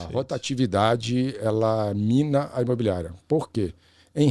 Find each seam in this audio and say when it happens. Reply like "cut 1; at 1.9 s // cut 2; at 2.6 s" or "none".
none